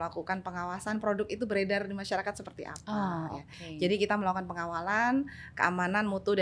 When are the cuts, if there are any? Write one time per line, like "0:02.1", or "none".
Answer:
none